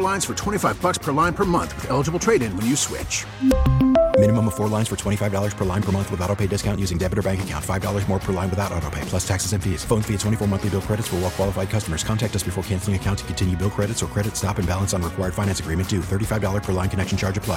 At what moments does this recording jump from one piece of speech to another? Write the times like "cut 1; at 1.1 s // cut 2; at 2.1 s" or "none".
none